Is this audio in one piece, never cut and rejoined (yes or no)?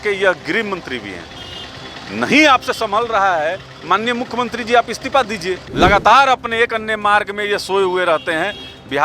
no